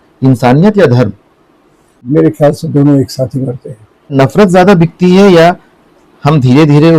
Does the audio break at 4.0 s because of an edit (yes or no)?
yes